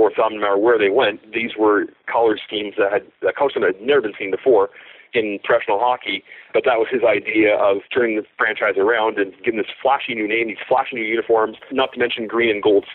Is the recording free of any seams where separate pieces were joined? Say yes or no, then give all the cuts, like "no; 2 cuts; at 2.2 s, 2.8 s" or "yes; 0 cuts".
no; 3 cuts; at 6.5 s, 7.8 s, 11.7 s